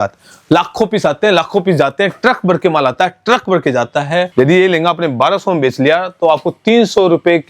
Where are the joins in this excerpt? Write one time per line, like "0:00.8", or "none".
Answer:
0:04.3